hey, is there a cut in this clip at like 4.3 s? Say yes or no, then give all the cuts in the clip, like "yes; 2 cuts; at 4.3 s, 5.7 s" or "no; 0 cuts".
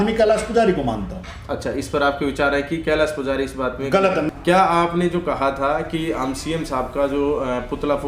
yes; 1 cut; at 4.3 s